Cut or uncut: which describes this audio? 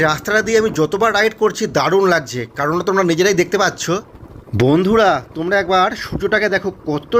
cut